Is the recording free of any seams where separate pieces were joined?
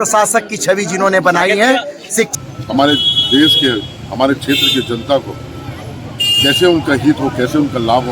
no; 1 cut; at 2.3 s

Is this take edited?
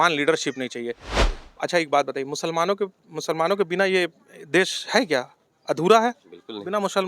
yes; 1 cut; at 1.3 s

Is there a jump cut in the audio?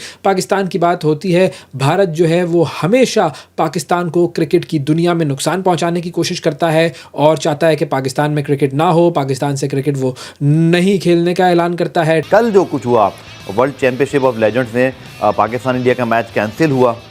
no; 0 cuts

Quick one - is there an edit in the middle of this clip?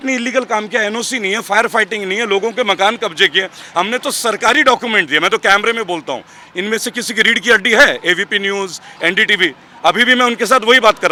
no; 0 cuts

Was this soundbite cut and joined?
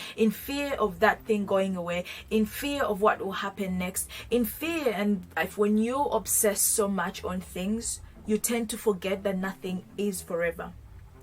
yes; 1 cut; at 5.3 s

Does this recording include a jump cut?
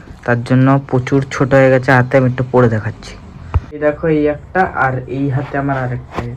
no; 0 cuts

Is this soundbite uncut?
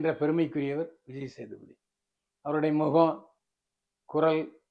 yes; 0 cuts

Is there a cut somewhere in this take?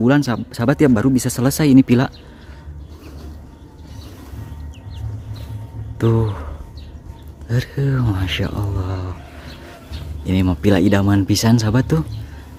no; 0 cuts

